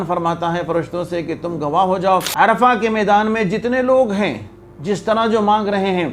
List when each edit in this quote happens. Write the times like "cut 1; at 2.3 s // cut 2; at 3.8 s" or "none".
cut 1; at 2.3 s